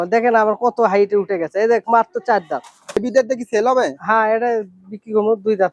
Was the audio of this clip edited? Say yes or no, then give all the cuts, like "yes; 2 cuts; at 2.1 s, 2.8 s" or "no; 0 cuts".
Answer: yes; 1 cut; at 3.0 s